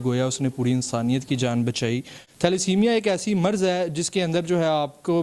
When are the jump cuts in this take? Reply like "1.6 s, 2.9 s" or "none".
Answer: 2.2 s